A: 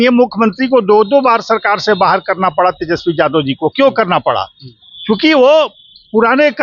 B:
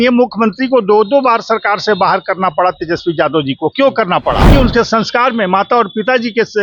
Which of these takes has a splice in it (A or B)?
B